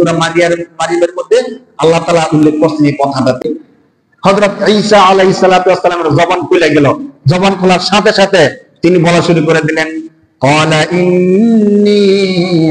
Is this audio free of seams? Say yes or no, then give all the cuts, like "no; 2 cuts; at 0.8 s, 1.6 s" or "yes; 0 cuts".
no; 1 cut; at 3.4 s